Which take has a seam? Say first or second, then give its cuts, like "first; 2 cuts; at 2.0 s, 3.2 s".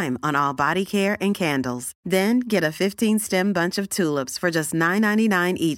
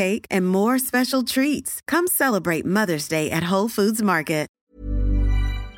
second; 1 cut; at 4.7 s